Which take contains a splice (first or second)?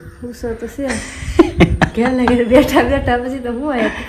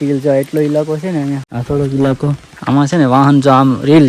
second